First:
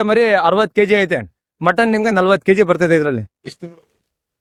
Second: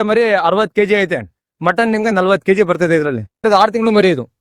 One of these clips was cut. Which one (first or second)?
second